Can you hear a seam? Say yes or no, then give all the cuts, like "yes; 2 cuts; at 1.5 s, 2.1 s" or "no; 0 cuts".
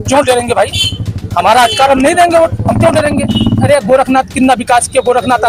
yes; 1 cut; at 3.6 s